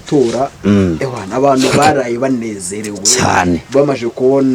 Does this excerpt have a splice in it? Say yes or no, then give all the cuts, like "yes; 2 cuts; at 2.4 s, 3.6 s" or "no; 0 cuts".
no; 0 cuts